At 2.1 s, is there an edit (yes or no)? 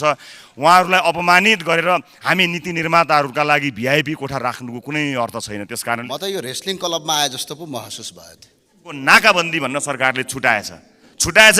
no